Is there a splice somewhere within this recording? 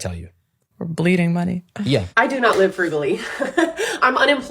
yes; 1 cut; at 2.1 s

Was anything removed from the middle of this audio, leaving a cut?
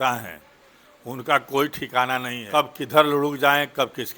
yes; 1 cut; at 2.4 s

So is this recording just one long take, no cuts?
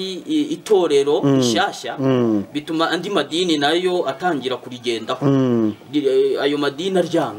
yes; 0 cuts

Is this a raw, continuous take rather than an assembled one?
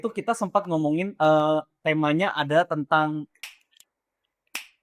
no; 1 cut; at 3.5 s

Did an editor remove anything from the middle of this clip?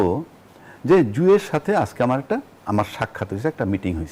no; 0 cuts

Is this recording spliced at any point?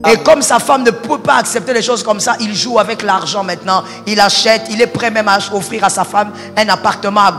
no; 0 cuts

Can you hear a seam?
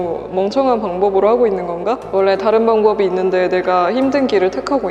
no; 0 cuts

